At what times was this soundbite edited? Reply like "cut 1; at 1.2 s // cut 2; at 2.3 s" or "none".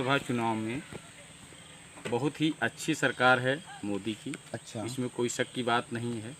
none